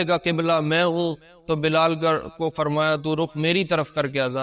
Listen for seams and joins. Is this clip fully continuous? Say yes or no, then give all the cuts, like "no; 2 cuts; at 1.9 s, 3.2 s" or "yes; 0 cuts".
yes; 0 cuts